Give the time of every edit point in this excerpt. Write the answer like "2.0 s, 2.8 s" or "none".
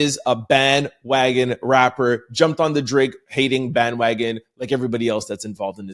none